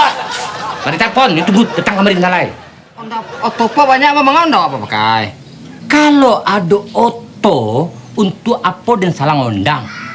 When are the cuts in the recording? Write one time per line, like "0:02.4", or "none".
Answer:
0:03.1